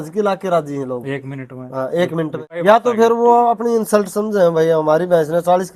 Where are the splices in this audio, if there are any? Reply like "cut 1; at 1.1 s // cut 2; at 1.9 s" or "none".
cut 1; at 2.6 s